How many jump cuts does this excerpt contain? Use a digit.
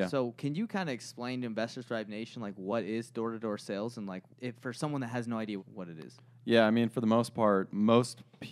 3